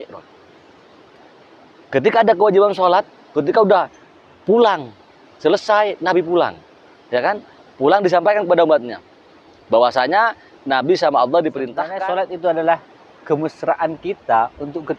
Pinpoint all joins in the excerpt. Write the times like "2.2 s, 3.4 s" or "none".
11.8 s

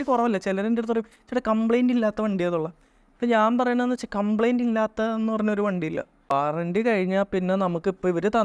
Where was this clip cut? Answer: 6.1 s

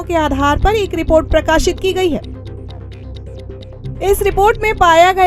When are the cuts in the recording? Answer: none

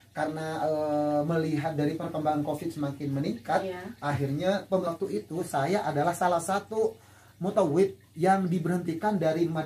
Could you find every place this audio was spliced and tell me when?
4.9 s

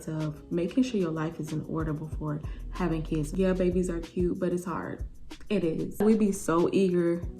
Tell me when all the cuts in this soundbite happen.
3.3 s, 6.0 s

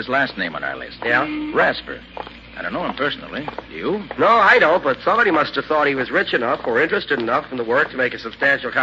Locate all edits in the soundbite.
7.0 s

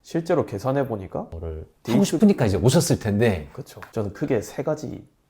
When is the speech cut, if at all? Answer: 1.9 s

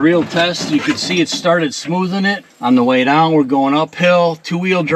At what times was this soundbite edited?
2.5 s

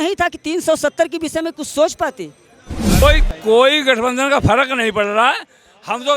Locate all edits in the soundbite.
3.0 s

